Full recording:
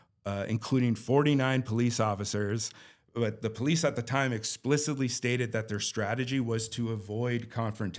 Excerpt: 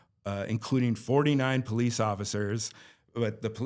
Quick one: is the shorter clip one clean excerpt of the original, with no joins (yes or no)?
yes